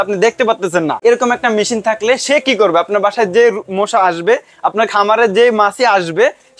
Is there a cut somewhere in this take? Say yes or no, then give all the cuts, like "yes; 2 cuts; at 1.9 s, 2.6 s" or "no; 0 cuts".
yes; 1 cut; at 0.9 s